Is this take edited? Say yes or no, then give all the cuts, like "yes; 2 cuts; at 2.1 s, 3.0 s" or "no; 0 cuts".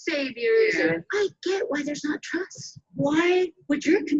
yes; 2 cuts; at 1.0 s, 2.9 s